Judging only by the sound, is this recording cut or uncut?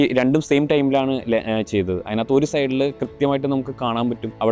uncut